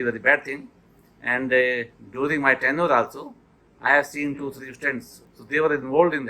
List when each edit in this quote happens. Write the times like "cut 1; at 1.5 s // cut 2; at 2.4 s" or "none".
cut 1; at 5.2 s